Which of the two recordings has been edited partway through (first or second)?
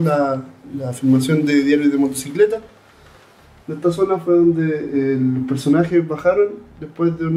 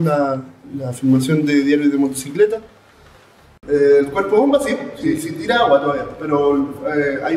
second